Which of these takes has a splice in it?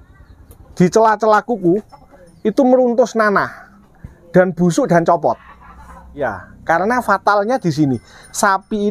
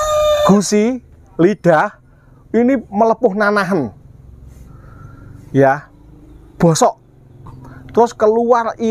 first; 1 cut; at 6.2 s

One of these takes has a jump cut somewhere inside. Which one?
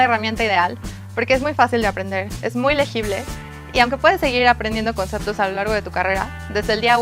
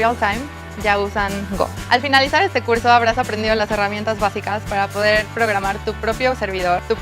second; 1 cut; at 4.3 s

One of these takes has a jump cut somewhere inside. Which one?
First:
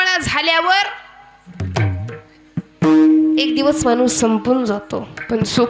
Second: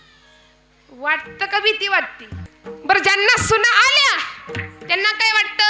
second; 1 cut; at 2.2 s

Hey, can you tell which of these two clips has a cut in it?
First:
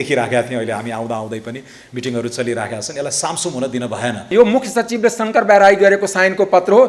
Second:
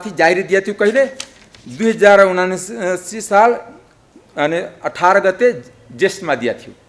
first; 1 cut; at 4.3 s

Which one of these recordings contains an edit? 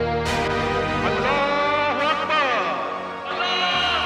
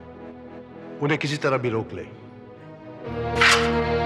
second; 1 cut; at 3.0 s

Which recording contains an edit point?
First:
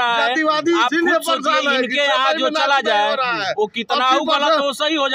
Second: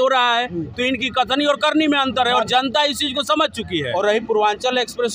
second; 1 cut; at 3.9 s

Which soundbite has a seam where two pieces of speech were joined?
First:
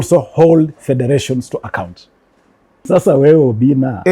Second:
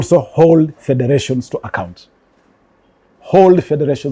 first; 1 cut; at 2.8 s

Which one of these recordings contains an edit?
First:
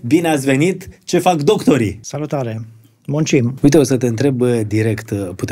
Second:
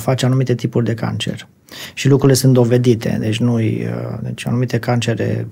first; 2 cuts; at 2.0 s, 3.5 s

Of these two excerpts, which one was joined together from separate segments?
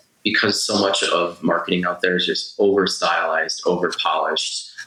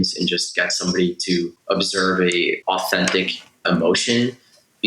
second; 3 cuts; at 1.6 s, 2.6 s, 3.6 s

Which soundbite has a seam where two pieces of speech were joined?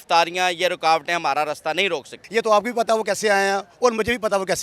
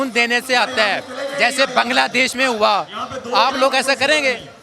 first; 1 cut; at 2.2 s

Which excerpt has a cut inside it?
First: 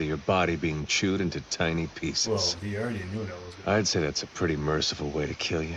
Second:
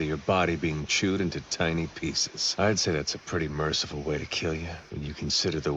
second; 2 cuts; at 2.2 s, 4.8 s

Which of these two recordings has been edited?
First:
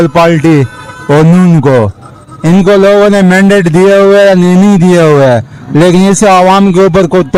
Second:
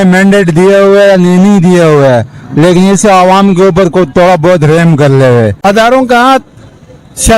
second; 1 cut; at 5.6 s

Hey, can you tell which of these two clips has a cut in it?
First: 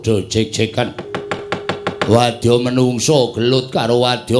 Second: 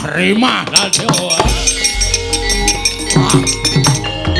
first; 1 cut; at 1.4 s

